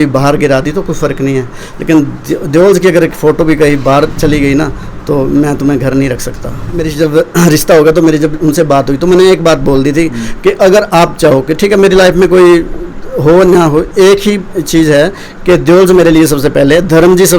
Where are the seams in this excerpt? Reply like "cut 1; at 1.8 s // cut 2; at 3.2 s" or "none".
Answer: cut 1; at 6.9 s